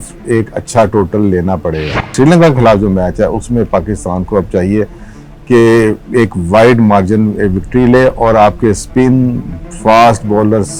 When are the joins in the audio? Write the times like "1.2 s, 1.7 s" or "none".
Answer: 2.1 s